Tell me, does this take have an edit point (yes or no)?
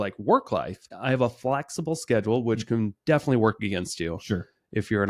yes